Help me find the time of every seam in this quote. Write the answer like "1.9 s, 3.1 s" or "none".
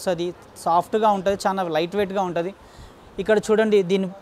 none